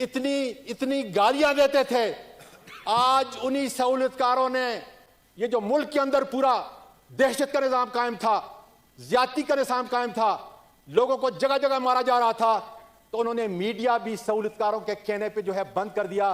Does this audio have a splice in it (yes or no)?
no